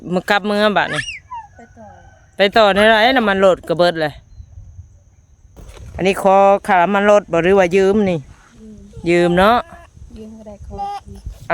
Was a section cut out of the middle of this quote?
yes; 1 cut; at 5.0 s

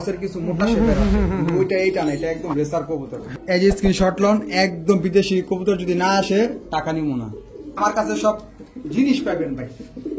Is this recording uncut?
no; 2 cuts; at 3.3 s, 7.8 s

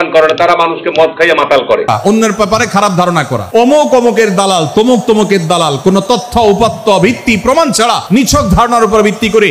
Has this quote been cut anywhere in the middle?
yes; 1 cut; at 1.9 s

